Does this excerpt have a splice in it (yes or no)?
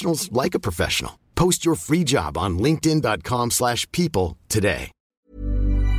yes